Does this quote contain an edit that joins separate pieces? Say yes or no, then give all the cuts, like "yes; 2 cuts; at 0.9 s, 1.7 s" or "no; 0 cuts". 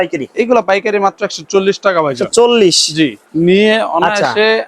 no; 0 cuts